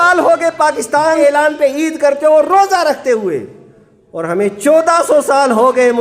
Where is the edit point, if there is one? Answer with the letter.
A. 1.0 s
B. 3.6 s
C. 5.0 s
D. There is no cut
A